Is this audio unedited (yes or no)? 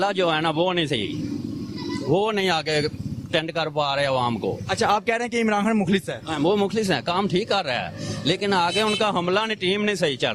yes